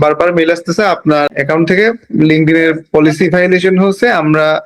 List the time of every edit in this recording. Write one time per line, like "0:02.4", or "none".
0:01.3